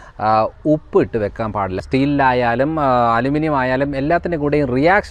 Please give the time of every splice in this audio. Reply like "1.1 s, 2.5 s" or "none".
1.8 s